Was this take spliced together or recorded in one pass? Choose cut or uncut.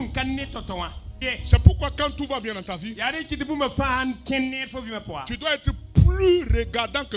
cut